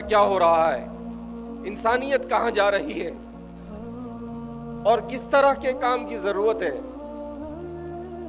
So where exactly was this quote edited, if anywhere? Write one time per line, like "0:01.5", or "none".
0:03.1
0:04.5
0:06.8